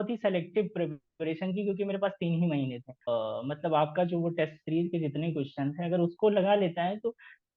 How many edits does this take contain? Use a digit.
1